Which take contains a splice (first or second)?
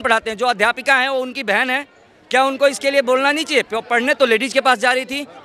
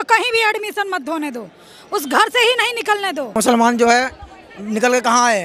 second